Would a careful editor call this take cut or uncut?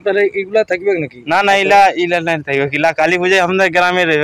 uncut